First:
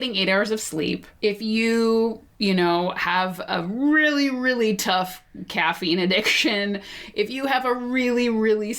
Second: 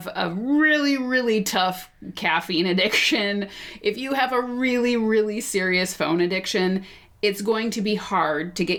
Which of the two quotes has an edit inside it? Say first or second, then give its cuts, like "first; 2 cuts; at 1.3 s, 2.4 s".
first; 2 cuts; at 1.1 s, 2.3 s